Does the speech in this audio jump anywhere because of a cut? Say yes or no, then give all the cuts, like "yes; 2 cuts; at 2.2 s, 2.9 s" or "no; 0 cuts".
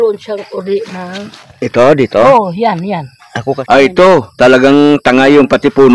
yes; 1 cut; at 3.5 s